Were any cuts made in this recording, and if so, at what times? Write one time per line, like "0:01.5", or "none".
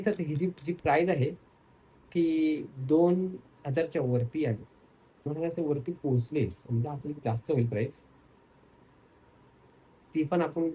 none